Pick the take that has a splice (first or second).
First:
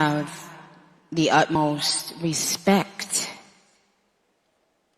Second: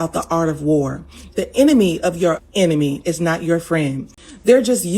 first